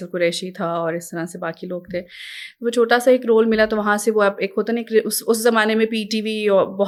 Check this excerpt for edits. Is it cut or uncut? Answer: uncut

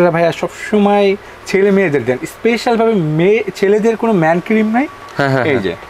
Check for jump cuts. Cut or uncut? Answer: uncut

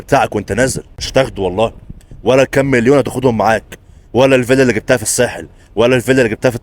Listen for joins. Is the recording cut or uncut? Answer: cut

